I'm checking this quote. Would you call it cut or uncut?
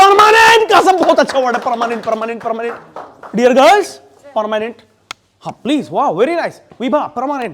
uncut